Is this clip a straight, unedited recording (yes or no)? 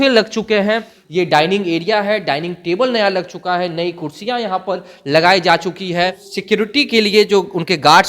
no